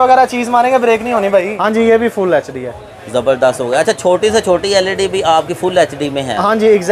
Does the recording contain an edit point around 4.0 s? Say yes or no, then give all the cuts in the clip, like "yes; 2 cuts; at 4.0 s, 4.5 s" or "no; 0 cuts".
no; 1 cut; at 1.5 s